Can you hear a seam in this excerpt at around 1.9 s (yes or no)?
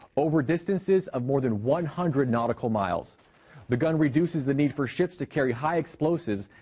no